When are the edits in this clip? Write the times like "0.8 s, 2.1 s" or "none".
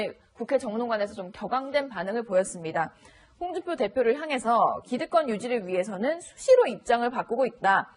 none